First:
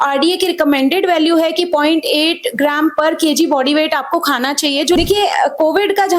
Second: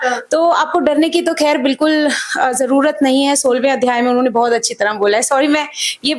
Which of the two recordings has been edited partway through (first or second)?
first